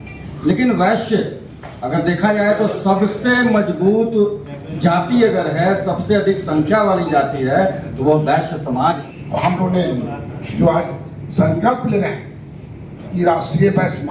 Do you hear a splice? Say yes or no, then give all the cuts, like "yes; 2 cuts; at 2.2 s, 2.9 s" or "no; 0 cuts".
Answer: yes; 1 cut; at 9.1 s